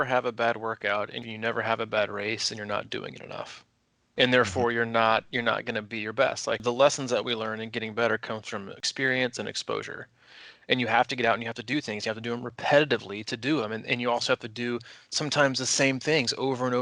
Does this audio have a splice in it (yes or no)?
yes